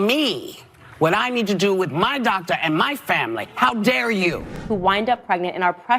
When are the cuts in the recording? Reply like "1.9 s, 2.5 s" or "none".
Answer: 4.5 s

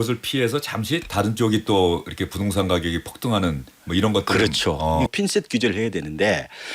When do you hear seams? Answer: 5.1 s

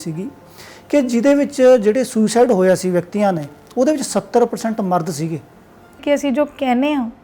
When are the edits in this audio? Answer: 6.0 s

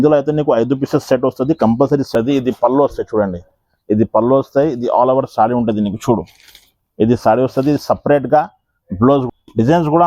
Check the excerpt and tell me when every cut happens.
2.1 s, 9.3 s

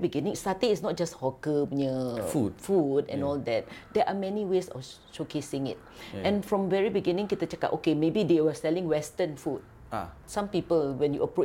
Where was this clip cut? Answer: none

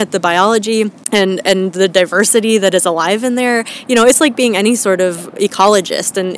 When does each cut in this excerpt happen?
1.0 s

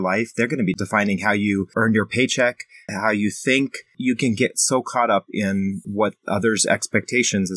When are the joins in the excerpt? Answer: 0.8 s, 1.7 s, 2.9 s, 3.9 s, 5.8 s

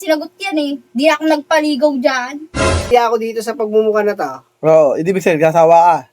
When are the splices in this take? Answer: 2.9 s

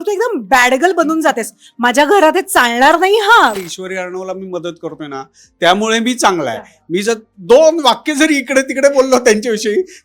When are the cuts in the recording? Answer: 3.6 s

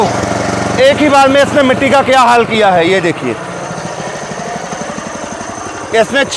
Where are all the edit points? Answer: none

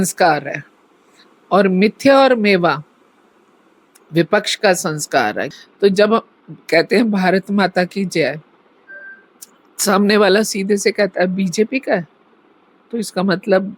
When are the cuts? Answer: 5.5 s

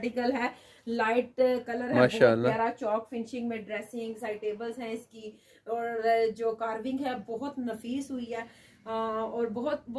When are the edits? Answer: none

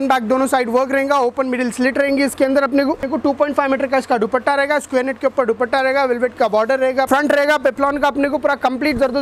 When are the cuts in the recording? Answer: 3.1 s, 7.1 s

